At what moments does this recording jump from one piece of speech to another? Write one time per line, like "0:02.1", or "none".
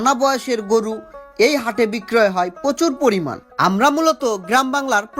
none